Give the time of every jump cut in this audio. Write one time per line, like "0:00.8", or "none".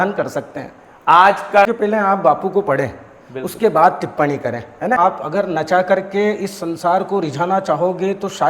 0:01.7
0:05.0